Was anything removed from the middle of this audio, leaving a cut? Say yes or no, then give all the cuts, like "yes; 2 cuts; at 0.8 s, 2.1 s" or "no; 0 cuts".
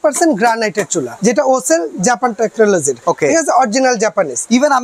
yes; 2 cuts; at 1.1 s, 2.9 s